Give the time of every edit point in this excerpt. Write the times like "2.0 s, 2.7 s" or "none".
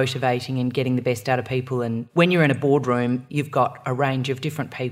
2.0 s, 3.3 s